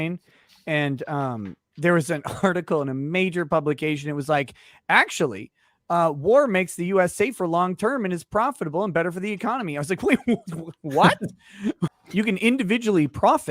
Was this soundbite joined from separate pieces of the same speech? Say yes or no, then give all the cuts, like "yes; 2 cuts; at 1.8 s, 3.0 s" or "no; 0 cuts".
yes; 1 cut; at 11.9 s